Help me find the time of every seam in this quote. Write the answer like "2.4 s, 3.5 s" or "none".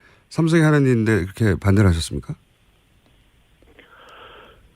2.0 s